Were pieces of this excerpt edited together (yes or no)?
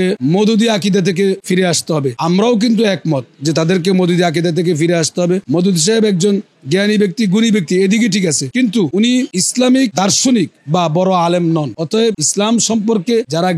no